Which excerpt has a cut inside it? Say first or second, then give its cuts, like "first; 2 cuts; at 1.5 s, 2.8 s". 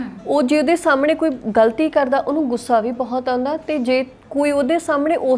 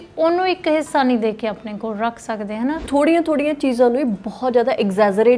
second; 1 cut; at 2.8 s